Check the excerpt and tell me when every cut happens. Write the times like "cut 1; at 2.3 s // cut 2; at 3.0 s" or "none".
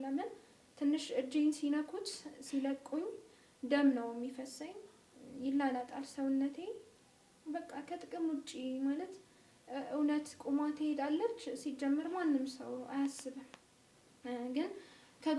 none